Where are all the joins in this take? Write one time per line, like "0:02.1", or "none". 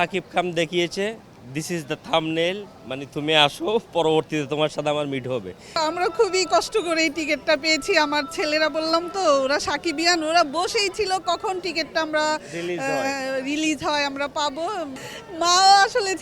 0:05.8
0:15.0